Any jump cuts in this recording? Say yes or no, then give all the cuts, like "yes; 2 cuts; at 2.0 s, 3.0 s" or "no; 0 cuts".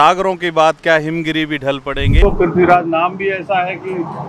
yes; 1 cut; at 2.2 s